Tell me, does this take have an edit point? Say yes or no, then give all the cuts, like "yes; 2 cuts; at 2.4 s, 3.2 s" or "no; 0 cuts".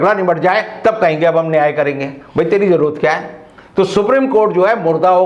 no; 0 cuts